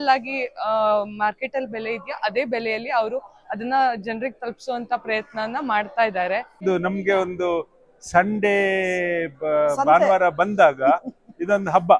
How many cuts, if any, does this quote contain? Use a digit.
1